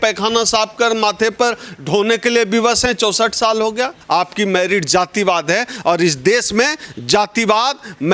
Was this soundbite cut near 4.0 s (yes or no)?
yes